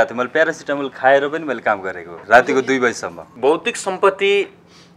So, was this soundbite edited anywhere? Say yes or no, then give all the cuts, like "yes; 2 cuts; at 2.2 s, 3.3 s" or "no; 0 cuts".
yes; 2 cuts; at 2.1 s, 3.2 s